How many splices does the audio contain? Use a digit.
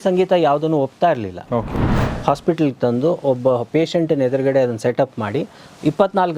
1